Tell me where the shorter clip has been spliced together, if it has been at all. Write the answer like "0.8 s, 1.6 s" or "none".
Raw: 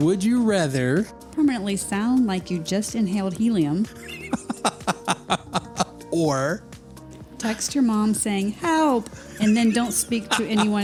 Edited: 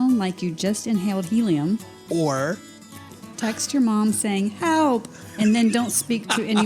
2.0 s